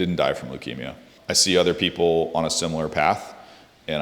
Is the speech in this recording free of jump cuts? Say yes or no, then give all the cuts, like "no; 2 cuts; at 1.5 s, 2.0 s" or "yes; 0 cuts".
no; 1 cut; at 1.1 s